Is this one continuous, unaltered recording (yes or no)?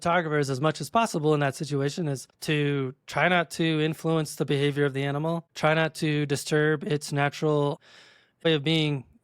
no